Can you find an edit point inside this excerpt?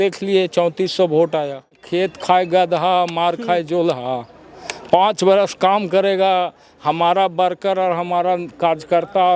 yes; 1 cut; at 1.8 s

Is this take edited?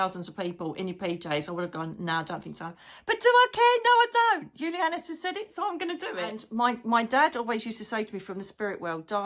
yes; 1 cut; at 6.4 s

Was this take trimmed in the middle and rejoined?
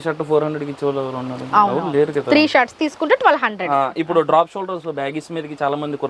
no; 0 cuts

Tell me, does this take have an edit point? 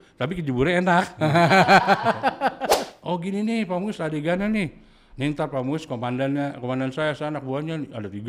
yes; 1 cut; at 2.9 s

